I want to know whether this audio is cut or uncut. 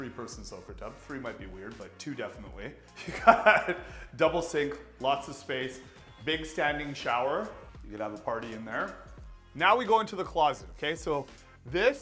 uncut